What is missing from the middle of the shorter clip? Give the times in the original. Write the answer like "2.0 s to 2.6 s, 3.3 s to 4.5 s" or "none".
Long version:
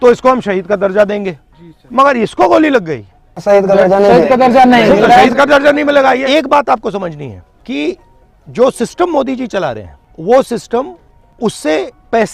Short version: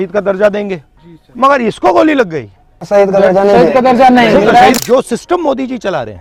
5.3 s to 8.5 s